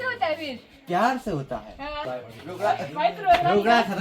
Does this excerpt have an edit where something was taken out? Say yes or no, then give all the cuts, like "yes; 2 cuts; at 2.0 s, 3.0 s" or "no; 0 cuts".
yes; 1 cut; at 2.1 s